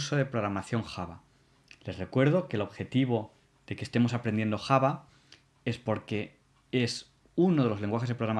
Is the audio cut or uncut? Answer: uncut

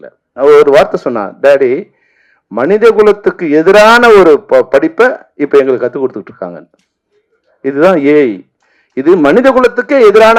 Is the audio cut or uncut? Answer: uncut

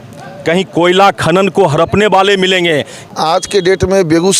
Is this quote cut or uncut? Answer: cut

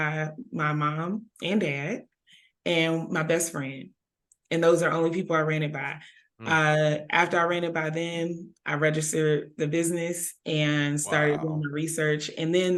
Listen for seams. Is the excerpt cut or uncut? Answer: uncut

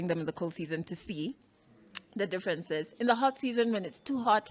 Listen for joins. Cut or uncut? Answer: uncut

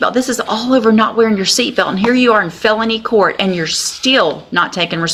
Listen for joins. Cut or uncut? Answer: uncut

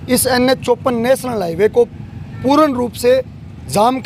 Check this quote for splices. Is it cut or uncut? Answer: uncut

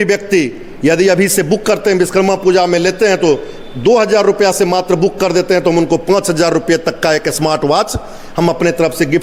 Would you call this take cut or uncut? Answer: uncut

